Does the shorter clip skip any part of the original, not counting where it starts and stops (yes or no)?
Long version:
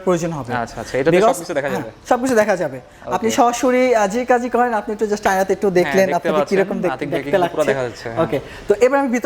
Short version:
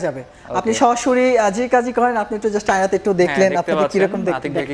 no